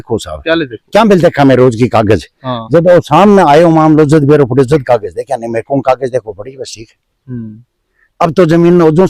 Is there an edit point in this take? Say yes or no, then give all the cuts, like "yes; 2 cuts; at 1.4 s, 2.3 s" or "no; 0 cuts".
no; 0 cuts